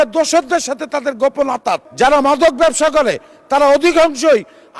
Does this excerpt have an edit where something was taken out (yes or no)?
yes